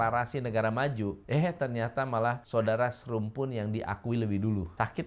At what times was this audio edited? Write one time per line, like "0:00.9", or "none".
none